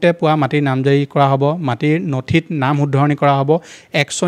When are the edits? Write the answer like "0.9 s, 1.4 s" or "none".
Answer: none